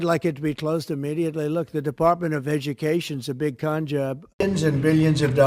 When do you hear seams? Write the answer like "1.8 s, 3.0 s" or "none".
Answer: 4.2 s